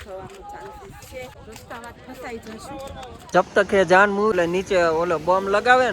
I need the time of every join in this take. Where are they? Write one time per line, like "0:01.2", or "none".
0:01.3
0:03.3
0:04.3